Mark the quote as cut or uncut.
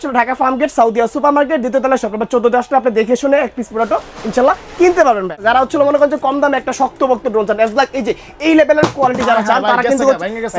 cut